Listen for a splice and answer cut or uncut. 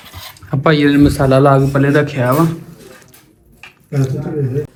uncut